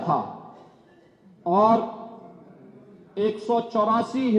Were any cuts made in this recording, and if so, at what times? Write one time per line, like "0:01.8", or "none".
none